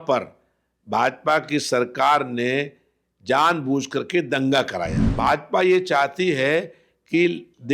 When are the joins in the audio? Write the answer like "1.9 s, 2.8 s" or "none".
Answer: 5.0 s